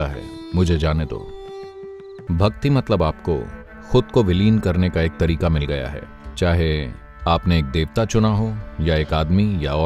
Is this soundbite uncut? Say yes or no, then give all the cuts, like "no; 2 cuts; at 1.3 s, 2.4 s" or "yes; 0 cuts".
no; 1 cut; at 2.2 s